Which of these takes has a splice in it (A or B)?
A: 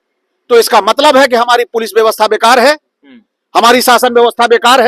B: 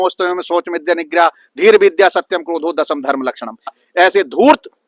B